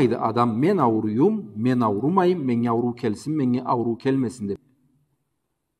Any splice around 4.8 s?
yes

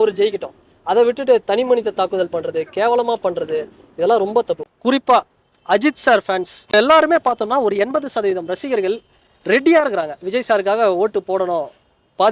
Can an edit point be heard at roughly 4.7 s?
yes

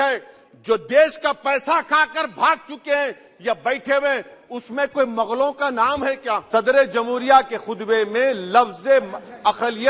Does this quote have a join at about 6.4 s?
yes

